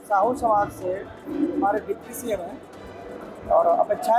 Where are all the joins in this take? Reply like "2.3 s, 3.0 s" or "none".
none